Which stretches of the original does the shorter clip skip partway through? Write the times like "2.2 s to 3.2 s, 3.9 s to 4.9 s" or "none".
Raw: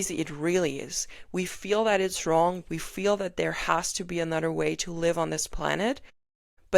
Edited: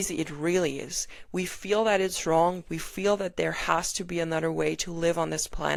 none